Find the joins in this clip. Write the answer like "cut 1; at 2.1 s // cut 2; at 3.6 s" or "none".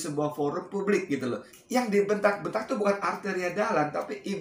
cut 1; at 1.5 s